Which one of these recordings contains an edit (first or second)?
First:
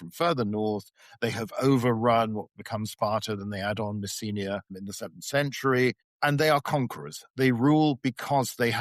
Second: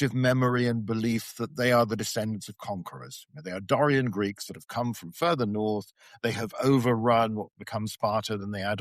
first